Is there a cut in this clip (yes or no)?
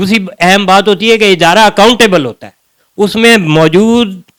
no